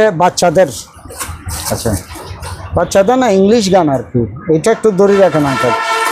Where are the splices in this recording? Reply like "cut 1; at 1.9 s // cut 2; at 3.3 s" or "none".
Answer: none